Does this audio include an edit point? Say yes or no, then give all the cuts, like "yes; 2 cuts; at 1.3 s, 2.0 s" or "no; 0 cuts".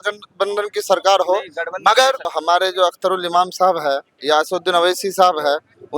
yes; 1 cut; at 2.3 s